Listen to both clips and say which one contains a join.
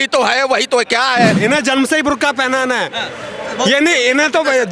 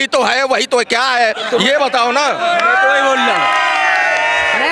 first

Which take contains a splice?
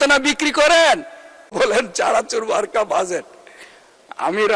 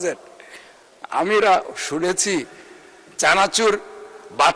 first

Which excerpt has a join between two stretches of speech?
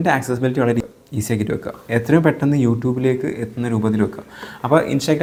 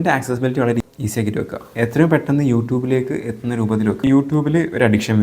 second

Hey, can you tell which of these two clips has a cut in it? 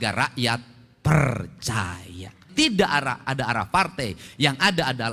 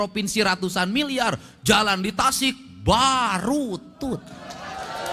first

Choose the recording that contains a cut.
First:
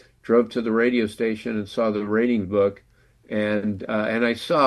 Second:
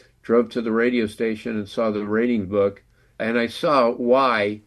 second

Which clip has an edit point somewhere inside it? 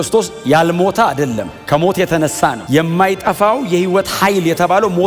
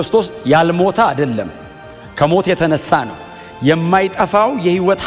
first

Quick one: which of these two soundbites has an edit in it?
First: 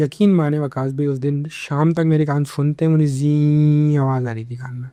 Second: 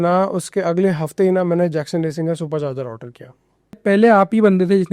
second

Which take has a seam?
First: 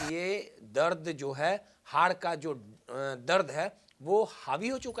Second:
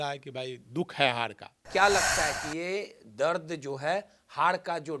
second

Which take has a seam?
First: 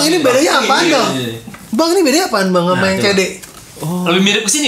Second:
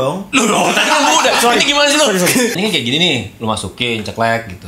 second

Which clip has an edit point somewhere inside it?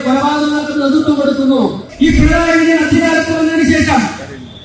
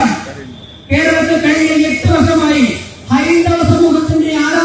first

